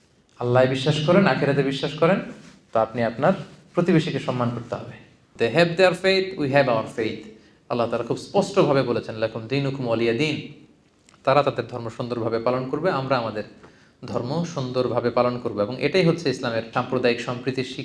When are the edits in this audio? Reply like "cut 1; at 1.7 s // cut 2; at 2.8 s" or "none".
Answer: cut 1; at 5.2 s // cut 2; at 16.7 s